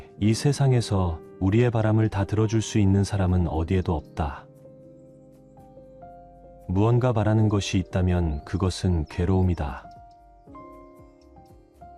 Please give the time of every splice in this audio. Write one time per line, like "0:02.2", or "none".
0:04.4
0:06.2